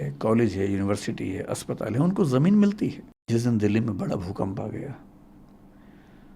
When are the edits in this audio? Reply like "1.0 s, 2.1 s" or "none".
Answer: 3.2 s

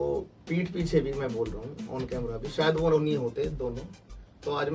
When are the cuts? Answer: none

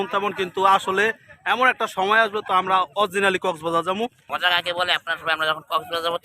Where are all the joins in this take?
4.2 s

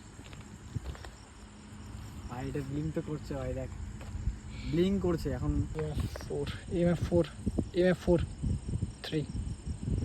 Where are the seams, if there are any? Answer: 5.7 s

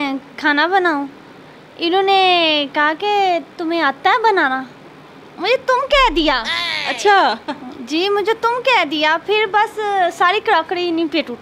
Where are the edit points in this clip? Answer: none

